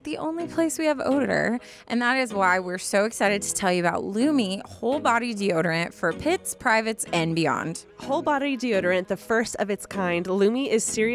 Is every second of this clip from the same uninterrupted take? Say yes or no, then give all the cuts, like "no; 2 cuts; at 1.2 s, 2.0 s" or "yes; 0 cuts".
yes; 0 cuts